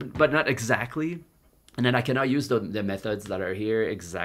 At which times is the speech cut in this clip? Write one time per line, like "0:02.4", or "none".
none